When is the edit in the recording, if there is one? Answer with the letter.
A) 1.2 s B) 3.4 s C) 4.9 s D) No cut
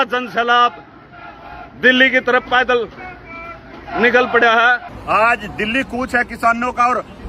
C